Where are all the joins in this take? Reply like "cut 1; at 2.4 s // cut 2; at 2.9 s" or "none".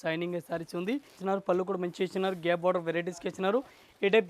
cut 1; at 1.1 s

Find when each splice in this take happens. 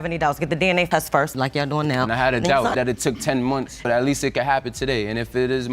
cut 1; at 1.3 s // cut 2; at 2.7 s

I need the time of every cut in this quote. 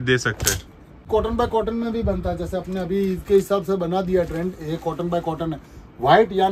cut 1; at 1.1 s

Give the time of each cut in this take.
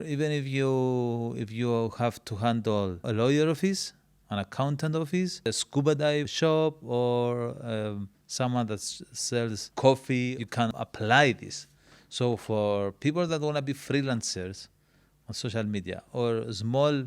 cut 1; at 3.1 s // cut 2; at 5.5 s // cut 3; at 6.3 s // cut 4; at 9.7 s // cut 5; at 10.3 s

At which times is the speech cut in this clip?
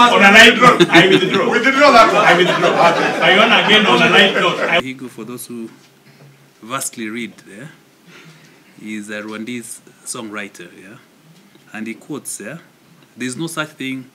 cut 1; at 4.8 s

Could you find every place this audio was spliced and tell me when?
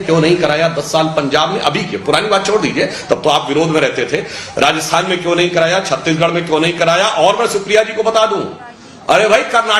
none

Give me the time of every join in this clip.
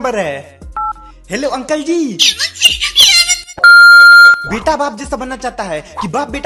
none

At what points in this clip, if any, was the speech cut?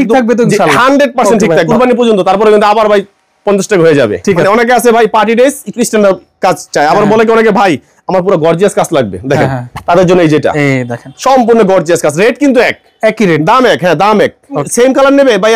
cut 1; at 1.7 s // cut 2; at 4.4 s // cut 3; at 14.7 s

